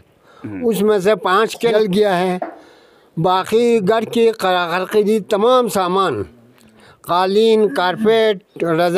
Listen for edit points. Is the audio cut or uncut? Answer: cut